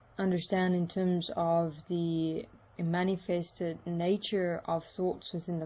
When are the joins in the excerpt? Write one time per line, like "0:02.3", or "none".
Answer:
0:02.7